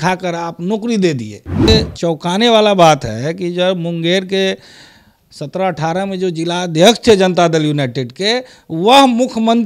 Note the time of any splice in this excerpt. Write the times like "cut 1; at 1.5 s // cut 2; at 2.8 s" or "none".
cut 1; at 1.7 s